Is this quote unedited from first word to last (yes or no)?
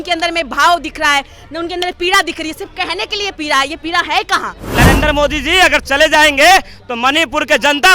no